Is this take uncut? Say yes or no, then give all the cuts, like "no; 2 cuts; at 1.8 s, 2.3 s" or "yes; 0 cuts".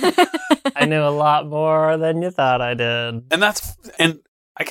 yes; 0 cuts